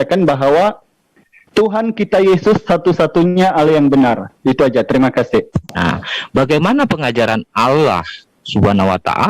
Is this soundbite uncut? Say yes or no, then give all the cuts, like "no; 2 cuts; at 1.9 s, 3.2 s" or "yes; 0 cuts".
no; 1 cut; at 5.6 s